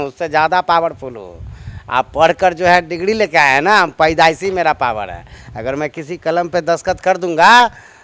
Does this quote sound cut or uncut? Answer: uncut